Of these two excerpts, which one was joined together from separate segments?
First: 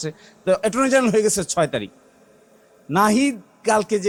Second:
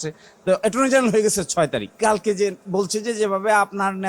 second; 1 cut; at 1.9 s

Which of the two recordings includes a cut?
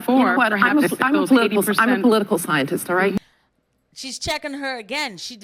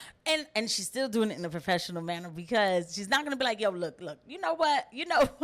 first; 1 cut; at 3.2 s

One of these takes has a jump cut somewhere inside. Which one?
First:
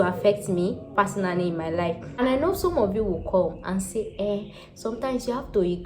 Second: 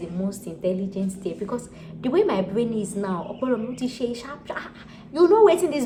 first; 1 cut; at 2.0 s

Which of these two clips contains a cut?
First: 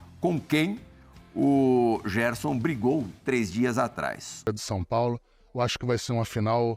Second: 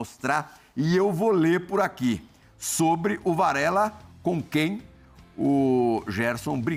first; 1 cut; at 4.5 s

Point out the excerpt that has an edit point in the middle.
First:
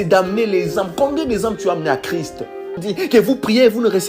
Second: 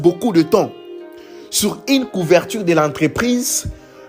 first; 1 cut; at 2.8 s

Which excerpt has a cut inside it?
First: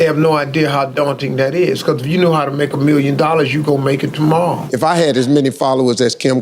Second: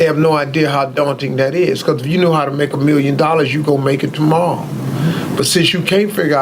first; 1 cut; at 4.6 s

